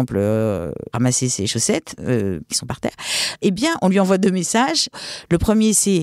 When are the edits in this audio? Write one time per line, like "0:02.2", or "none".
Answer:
0:00.9
0:02.5
0:05.0